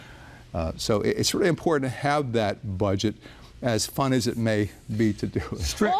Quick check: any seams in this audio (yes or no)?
no